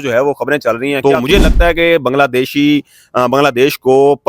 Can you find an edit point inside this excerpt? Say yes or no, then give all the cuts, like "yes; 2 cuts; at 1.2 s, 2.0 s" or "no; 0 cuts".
yes; 1 cut; at 1.0 s